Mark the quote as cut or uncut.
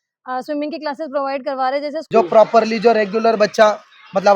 cut